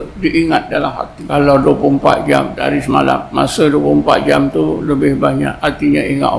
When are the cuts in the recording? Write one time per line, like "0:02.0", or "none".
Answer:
0:01.1
0:02.6
0:03.3
0:05.6